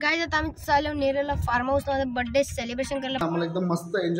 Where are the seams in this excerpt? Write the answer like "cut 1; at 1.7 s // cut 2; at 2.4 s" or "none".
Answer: cut 1; at 3.2 s